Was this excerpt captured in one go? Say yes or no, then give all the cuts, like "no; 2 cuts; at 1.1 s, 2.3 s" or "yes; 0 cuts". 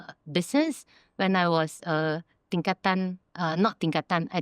no; 1 cut; at 3.2 s